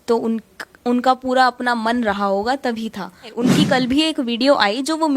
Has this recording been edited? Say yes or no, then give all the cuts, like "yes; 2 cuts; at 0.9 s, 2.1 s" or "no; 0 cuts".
yes; 1 cut; at 3.3 s